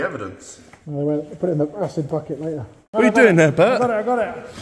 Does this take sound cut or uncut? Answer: cut